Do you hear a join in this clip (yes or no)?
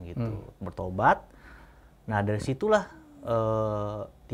no